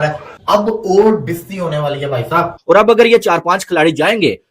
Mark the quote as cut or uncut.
cut